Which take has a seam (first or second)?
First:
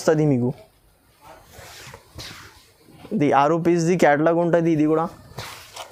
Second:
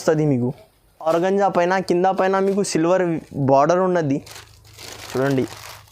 second